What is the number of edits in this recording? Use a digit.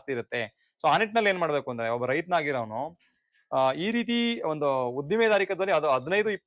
0